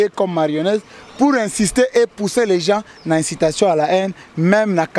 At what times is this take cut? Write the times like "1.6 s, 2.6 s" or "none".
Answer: none